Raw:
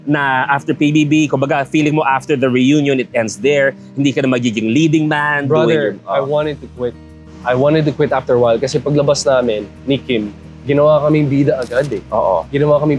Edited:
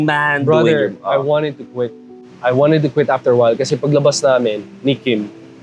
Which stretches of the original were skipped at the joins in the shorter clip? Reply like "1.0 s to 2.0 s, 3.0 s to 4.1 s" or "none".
none